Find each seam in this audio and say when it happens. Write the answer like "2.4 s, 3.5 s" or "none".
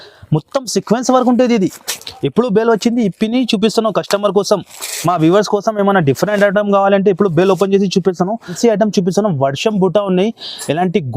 8.5 s